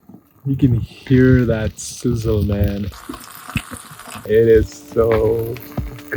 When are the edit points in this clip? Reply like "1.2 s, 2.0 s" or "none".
2.9 s, 4.2 s